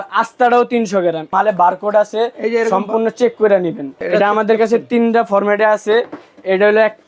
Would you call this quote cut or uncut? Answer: cut